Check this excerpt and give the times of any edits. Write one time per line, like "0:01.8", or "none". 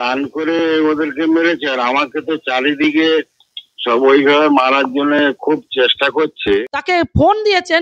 0:06.7